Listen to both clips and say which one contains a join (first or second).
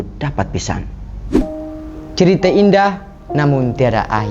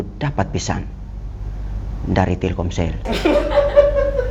first